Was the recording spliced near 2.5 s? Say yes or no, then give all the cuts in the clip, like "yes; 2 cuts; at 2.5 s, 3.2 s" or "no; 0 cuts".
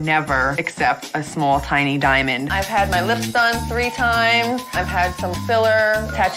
yes; 1 cut; at 2.5 s